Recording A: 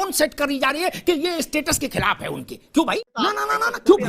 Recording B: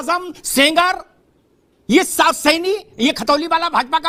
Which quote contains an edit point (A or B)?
A